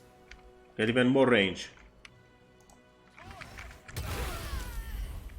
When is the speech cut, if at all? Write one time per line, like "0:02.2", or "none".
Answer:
0:02.1